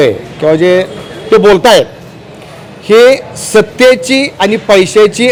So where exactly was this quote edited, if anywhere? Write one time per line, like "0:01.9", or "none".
none